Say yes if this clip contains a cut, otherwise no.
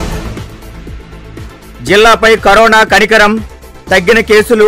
no